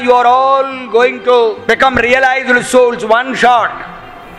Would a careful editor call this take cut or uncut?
cut